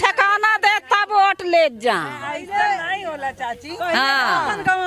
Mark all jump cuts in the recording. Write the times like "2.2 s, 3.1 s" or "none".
none